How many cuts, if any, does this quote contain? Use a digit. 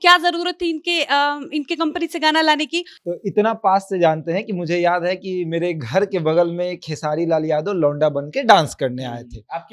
1